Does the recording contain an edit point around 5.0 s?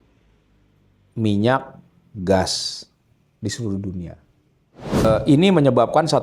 yes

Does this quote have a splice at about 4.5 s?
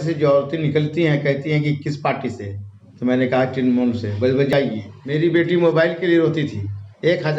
yes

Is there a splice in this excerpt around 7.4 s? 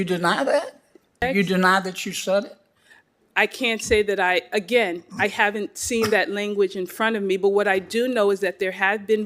no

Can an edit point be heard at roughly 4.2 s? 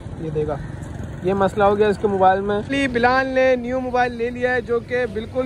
no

